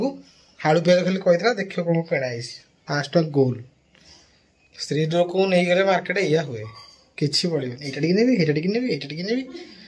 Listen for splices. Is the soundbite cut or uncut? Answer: uncut